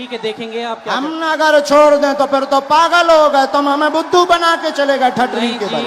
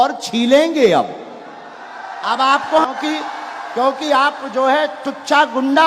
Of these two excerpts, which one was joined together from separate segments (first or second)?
second